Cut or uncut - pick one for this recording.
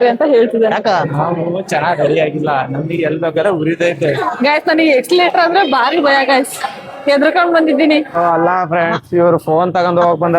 cut